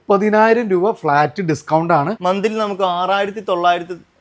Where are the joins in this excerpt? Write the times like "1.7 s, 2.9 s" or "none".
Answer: 2.2 s